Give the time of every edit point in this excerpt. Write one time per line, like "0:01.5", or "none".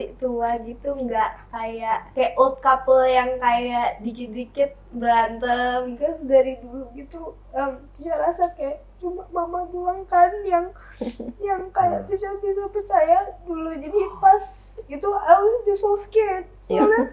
0:02.1
0:05.9

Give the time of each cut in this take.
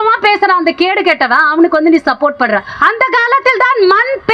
0:02.7

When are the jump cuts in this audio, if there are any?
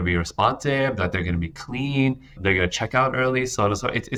none

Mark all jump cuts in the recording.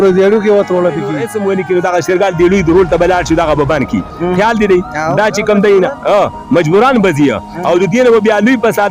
0:01.3

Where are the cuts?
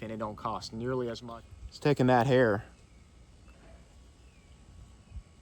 0:01.2

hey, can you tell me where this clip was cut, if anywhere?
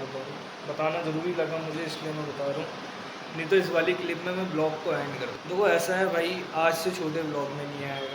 0:05.3

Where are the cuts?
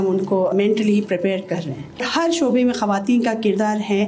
0:02.1

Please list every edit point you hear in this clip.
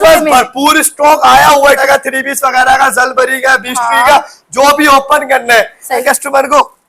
0:01.8
0:06.0

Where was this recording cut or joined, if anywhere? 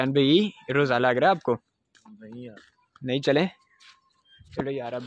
0:02.6

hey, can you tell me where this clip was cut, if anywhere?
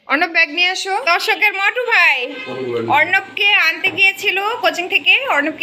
0:01.0

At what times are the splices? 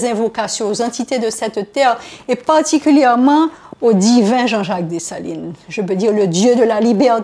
none

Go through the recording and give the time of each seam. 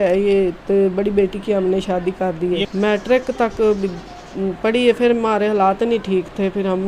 0:02.7

